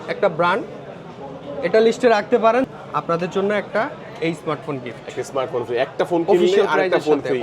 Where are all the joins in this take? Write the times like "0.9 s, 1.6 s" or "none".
2.7 s